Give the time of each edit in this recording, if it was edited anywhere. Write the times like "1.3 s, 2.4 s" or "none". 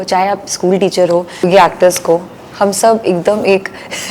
1.5 s